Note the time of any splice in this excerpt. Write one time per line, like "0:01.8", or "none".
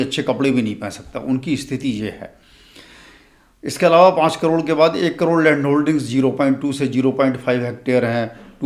none